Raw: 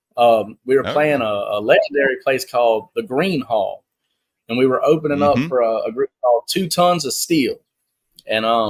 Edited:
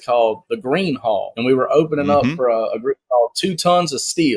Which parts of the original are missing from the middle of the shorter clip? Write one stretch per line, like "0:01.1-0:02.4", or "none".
0:03.8-0:04.4